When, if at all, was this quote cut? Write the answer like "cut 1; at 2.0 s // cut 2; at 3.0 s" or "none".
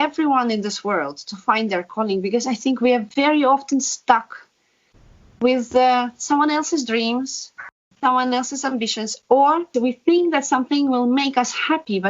cut 1; at 7.8 s // cut 2; at 9.7 s